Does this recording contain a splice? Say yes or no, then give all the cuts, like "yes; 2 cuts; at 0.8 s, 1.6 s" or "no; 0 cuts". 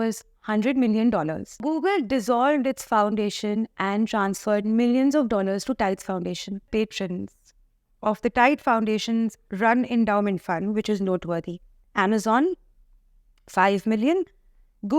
yes; 2 cuts; at 1.6 s, 6.7 s